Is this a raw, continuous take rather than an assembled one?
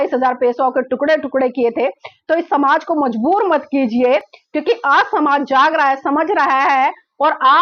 yes; 0 cuts

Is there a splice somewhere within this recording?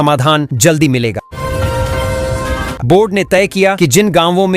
yes; 2 cuts; at 1.3 s, 2.8 s

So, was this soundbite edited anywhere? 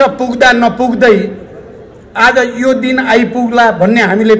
no; 0 cuts

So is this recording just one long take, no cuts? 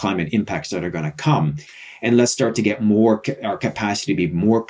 no; 1 cut; at 1.6 s

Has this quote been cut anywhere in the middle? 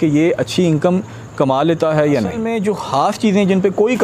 yes; 1 cut; at 2.5 s

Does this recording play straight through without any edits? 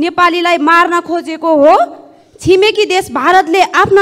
yes; 0 cuts

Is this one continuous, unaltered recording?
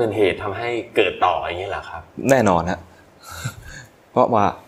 yes; 0 cuts

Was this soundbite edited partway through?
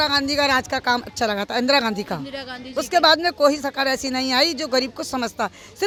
no; 0 cuts

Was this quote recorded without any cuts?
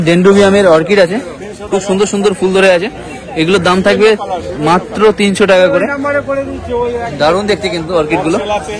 yes; 0 cuts

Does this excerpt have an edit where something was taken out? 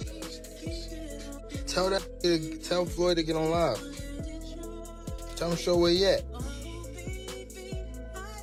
no; 0 cuts

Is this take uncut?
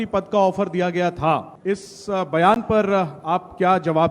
no; 1 cut; at 1.5 s

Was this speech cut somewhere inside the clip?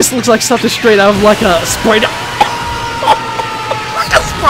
no; 0 cuts

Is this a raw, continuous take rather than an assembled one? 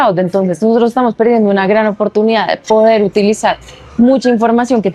yes; 0 cuts

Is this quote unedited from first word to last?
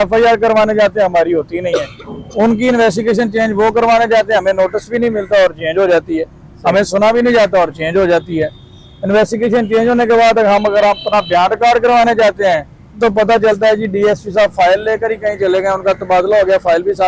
yes; 0 cuts

